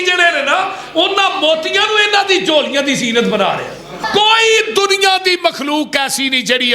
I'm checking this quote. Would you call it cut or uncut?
cut